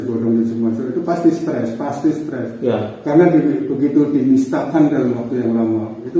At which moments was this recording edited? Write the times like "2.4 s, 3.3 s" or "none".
none